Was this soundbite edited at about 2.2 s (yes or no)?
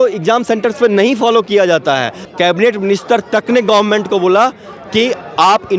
yes